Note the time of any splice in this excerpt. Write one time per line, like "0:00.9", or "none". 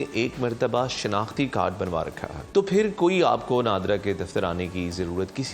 0:02.4